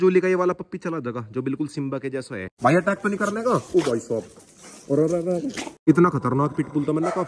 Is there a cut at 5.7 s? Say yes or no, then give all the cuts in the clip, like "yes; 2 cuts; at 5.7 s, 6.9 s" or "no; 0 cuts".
yes; 2 cuts; at 2.5 s, 5.7 s